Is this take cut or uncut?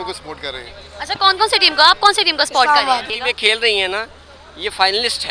cut